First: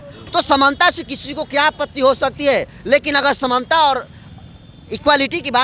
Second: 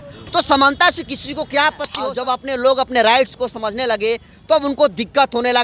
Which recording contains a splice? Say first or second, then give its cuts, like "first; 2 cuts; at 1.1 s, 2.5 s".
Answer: second; 1 cut; at 1.9 s